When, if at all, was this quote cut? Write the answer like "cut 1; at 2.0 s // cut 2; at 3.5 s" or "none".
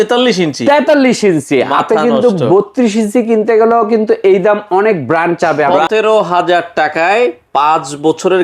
cut 1; at 5.8 s